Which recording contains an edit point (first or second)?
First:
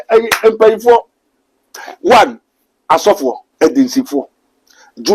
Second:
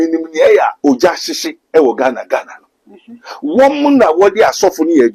first